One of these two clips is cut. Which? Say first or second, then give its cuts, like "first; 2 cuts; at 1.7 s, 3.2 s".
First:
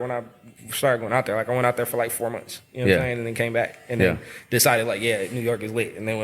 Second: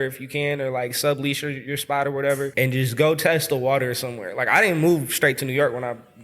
second; 1 cut; at 2.5 s